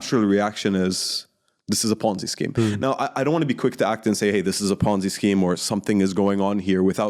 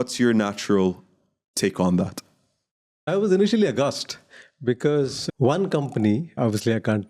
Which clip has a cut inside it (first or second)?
second